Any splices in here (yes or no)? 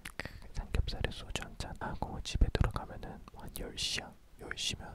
yes